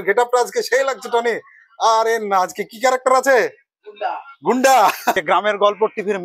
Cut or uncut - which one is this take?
cut